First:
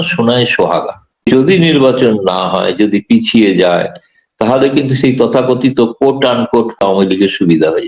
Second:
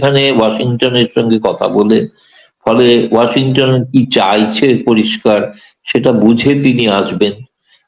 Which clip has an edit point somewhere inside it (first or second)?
first